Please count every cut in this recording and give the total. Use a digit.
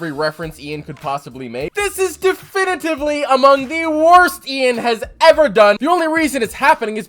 2